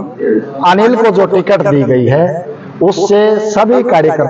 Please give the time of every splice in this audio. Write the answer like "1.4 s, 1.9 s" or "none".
none